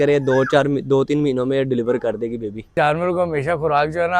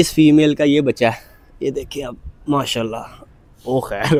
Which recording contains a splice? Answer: first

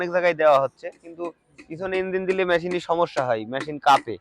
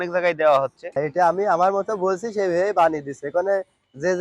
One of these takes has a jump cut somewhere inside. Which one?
second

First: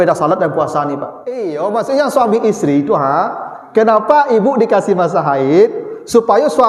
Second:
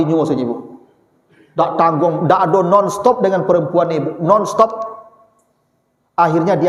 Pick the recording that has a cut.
first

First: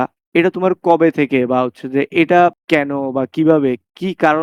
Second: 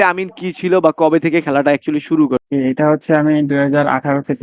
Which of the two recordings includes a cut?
second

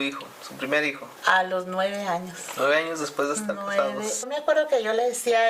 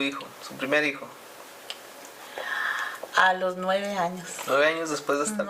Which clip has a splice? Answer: first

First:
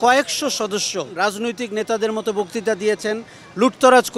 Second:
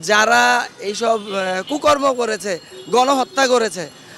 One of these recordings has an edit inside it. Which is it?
first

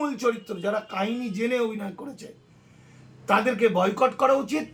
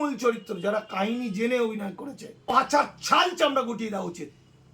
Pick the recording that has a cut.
second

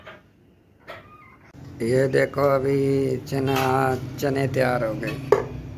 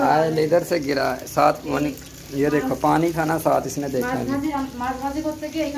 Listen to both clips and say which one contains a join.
first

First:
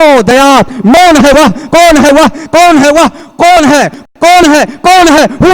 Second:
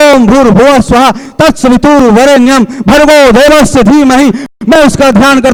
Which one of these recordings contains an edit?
first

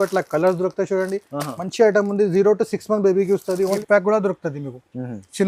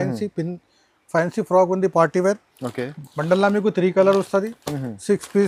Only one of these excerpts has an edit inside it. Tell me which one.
first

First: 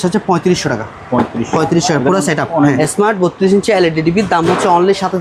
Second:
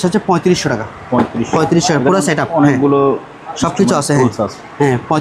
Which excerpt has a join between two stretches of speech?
first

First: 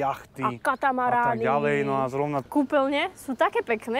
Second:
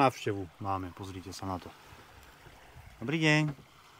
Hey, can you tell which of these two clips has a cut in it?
first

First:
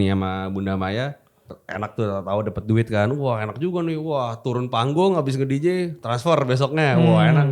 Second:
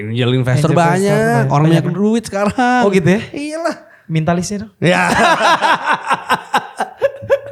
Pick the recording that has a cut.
first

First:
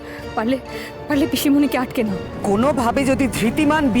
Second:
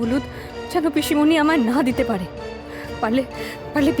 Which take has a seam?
first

